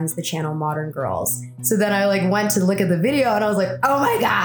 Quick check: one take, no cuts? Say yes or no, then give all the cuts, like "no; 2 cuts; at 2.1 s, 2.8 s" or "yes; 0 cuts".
no; 1 cut; at 1.5 s